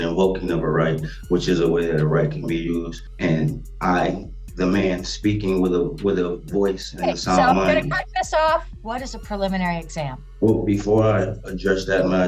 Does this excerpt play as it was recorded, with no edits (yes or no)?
no